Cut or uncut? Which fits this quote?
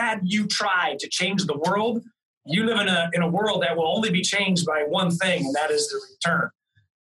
uncut